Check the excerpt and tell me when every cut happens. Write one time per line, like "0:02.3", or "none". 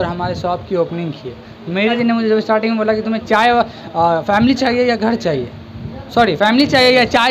0:01.9